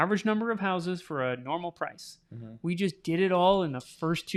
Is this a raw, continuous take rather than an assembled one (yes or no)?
yes